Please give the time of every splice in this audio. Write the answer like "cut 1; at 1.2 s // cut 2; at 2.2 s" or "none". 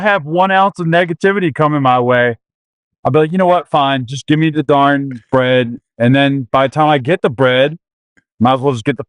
cut 1; at 4.6 s